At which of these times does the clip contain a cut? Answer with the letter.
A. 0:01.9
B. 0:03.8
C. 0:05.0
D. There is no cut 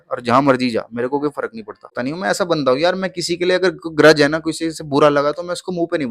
A